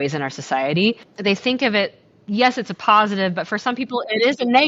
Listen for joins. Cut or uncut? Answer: cut